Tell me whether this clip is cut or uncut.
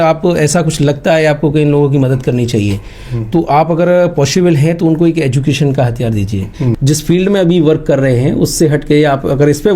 cut